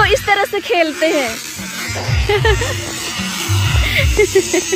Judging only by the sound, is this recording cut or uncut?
uncut